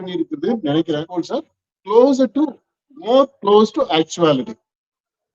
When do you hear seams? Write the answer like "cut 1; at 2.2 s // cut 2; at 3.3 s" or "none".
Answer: cut 1; at 1.1 s